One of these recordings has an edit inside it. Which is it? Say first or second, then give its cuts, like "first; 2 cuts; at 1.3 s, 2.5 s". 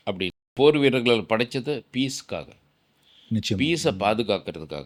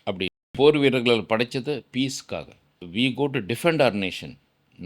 second; 1 cut; at 2.8 s